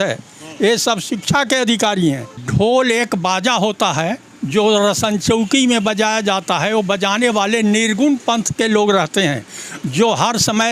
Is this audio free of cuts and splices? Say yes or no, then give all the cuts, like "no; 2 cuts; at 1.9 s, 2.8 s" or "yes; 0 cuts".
no; 1 cut; at 2.3 s